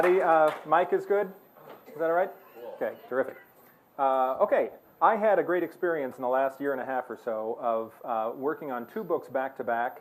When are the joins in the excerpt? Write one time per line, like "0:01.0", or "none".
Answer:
none